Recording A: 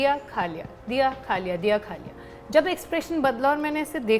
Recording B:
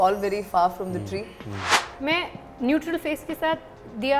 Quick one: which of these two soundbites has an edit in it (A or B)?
B